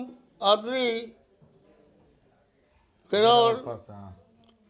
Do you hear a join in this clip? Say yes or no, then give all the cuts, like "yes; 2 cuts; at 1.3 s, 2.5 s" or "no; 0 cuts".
no; 0 cuts